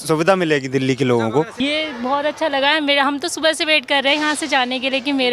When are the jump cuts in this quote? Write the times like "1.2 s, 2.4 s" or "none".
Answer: 1.5 s